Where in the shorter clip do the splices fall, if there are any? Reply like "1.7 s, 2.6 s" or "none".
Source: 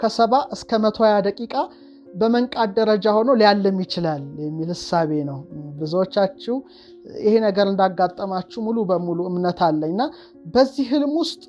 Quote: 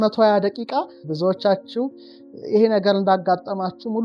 1.0 s